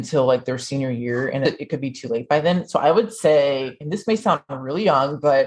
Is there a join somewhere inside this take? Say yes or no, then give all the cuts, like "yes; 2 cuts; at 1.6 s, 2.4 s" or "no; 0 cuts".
yes; 1 cut; at 1.4 s